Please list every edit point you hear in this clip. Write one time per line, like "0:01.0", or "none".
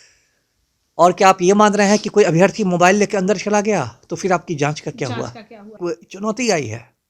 0:05.8